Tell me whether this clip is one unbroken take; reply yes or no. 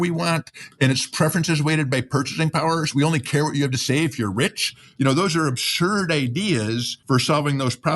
no